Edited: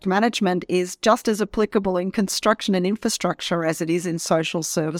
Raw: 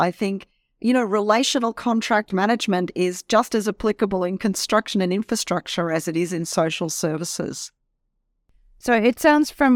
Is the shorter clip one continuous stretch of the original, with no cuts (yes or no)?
yes